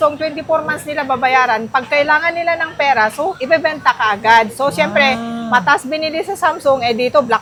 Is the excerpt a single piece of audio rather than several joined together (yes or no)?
yes